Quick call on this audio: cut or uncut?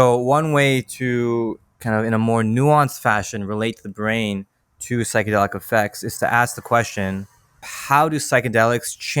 cut